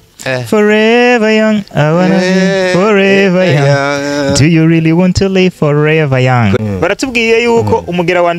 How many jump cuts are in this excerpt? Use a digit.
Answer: 1